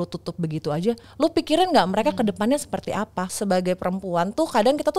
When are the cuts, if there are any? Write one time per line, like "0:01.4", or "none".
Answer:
0:03.3